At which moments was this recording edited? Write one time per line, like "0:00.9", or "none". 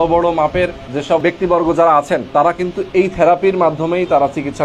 0:01.1
0:02.2

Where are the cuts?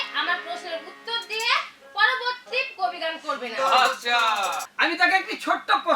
0:04.6

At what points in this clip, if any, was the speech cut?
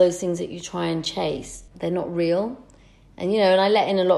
0:01.6

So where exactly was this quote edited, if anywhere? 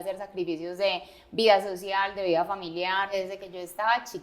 0:03.1

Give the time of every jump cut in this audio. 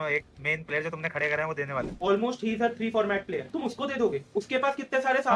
0:01.9
0:03.5

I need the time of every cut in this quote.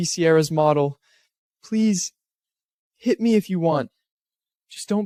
none

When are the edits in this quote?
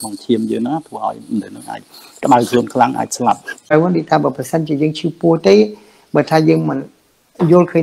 0:03.6

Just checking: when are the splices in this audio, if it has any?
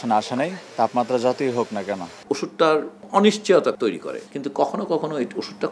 0:02.1
0:04.1

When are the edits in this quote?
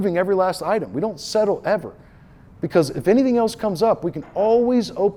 none

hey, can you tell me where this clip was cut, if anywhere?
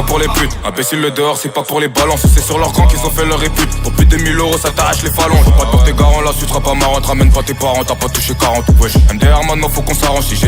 none

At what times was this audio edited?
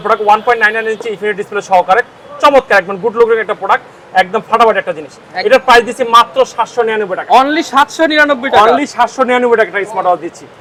none

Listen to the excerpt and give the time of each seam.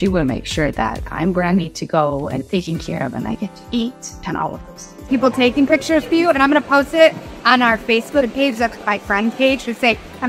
0:05.1

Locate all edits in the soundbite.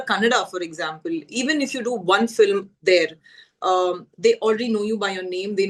none

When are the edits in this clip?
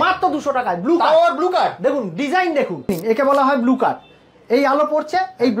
0:02.9

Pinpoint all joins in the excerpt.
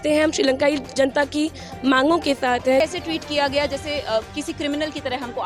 0:02.8

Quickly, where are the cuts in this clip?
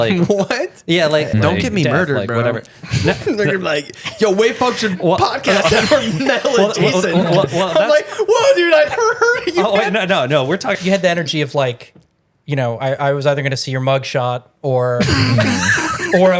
0:01.3
0:10.8

